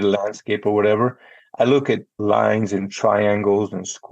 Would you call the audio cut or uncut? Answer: cut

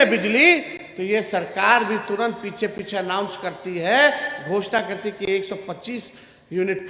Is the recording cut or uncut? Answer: uncut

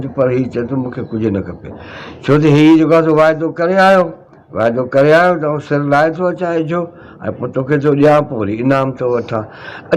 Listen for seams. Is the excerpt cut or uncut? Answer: uncut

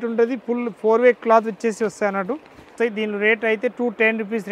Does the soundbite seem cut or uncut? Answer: cut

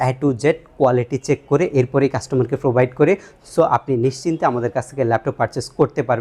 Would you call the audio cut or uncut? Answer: uncut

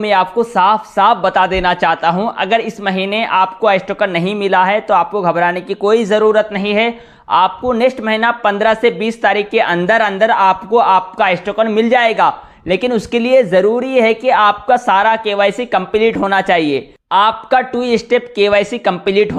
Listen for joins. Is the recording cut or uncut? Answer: uncut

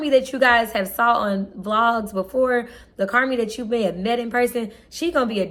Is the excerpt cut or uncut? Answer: uncut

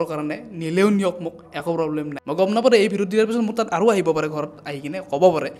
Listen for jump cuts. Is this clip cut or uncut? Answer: cut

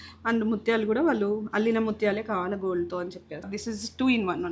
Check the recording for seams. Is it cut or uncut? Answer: cut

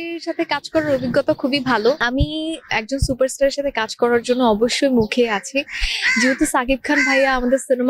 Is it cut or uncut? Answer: cut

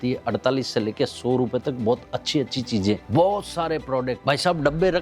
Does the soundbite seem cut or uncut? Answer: uncut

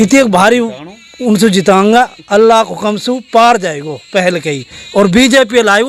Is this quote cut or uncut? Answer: uncut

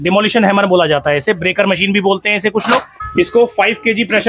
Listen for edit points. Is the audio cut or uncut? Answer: cut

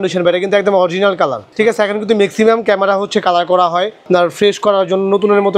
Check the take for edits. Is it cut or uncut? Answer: uncut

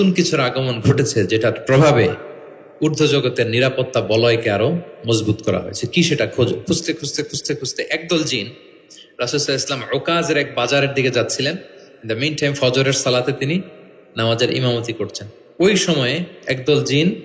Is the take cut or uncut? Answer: uncut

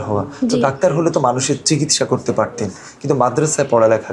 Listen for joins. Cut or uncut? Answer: uncut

